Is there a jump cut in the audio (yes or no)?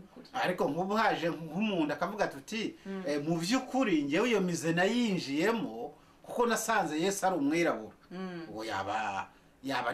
no